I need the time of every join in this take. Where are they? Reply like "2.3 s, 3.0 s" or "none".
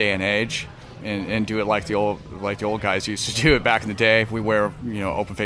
1.0 s